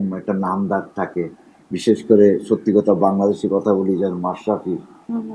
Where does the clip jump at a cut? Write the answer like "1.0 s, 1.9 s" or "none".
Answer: none